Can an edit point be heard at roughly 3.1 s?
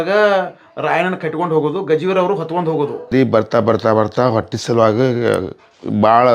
yes; 1 cut; at 3.1 s

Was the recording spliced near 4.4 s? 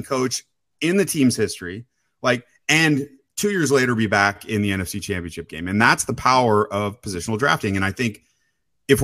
yes; 1 cut; at 4.4 s

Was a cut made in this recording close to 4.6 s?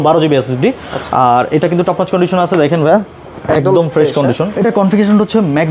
yes; 1 cut; at 4.6 s

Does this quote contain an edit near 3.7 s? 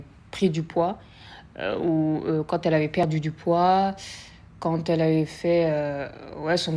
no; 0 cuts

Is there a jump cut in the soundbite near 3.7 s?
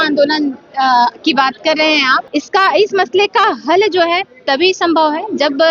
no; 1 cut; at 2.2 s

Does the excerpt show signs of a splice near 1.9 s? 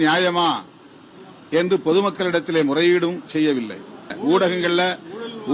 no; 1 cut; at 4.1 s

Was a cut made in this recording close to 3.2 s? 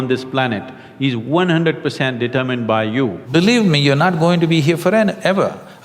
yes; 1 cut; at 3.2 s

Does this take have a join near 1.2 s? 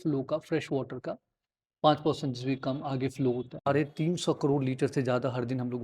no; 1 cut; at 3.6 s

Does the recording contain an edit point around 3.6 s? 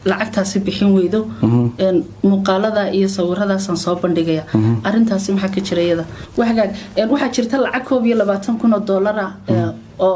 no; 1 cut; at 6.2 s

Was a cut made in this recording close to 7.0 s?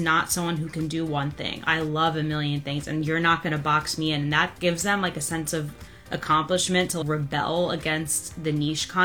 yes; 1 cut; at 7.0 s

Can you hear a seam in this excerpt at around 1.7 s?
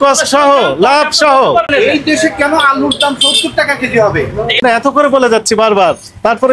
yes; 2 cuts; at 1.7 s, 4.6 s

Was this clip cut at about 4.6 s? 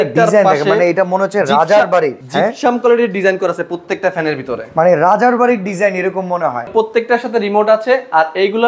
no; 2 cuts; at 2.2 s, 6.7 s

